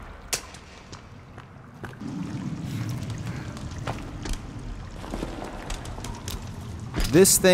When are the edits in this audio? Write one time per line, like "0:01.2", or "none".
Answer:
0:02.0